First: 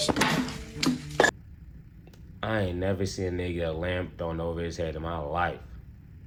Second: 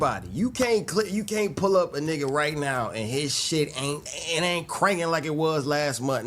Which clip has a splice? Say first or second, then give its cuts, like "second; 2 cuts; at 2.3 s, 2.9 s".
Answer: second; 1 cut; at 4.1 s